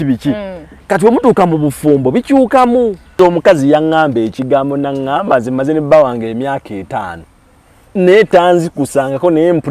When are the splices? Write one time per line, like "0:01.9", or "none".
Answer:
0:03.1